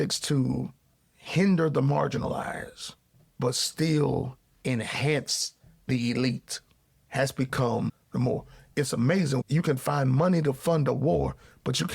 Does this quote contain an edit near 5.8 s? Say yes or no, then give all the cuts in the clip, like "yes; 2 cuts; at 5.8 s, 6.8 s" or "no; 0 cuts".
no; 1 cut; at 9.4 s